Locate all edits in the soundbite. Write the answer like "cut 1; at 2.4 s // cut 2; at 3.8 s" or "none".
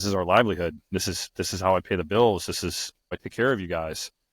cut 1; at 3.2 s

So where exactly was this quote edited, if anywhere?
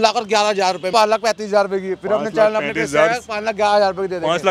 cut 1; at 0.9 s

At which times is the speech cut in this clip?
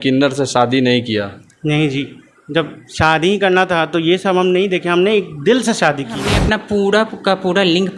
cut 1; at 6.3 s

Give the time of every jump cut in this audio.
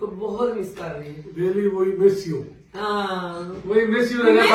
none

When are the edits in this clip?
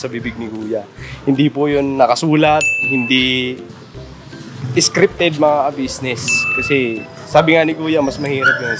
cut 1; at 4.4 s

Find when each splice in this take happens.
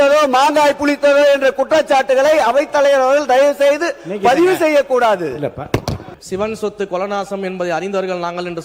cut 1; at 6.1 s

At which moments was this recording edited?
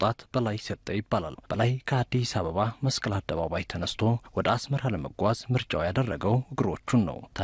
cut 1; at 1.4 s

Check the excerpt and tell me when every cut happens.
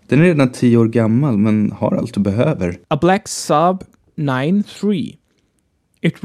none

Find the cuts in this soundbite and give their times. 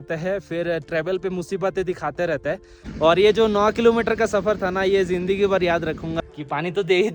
cut 1; at 2.8 s // cut 2; at 6.1 s

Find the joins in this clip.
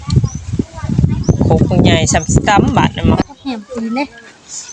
cut 1; at 3.2 s

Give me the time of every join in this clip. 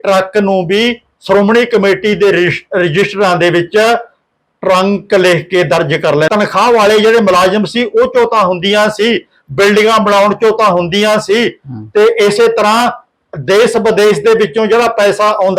cut 1; at 6.3 s

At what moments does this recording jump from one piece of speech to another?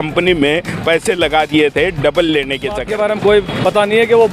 cut 1; at 2.8 s

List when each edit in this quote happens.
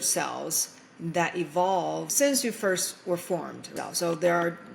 cut 1; at 2.1 s // cut 2; at 3.7 s

